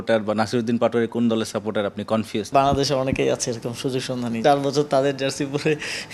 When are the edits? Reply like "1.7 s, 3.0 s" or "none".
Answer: 2.5 s, 4.4 s